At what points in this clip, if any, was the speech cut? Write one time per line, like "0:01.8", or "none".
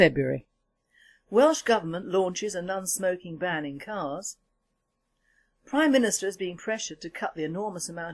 0:02.2